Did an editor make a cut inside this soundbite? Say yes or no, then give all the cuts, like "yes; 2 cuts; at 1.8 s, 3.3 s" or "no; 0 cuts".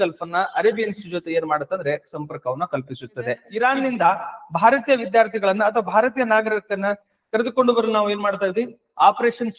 yes; 1 cut; at 3.4 s